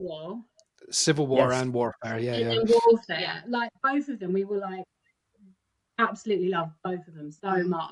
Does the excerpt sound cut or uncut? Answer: uncut